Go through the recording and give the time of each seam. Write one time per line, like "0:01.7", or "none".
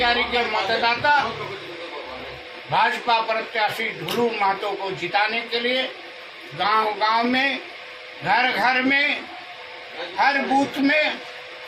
none